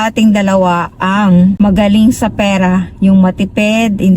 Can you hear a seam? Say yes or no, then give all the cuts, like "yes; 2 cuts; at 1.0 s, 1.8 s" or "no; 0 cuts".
yes; 1 cut; at 1.6 s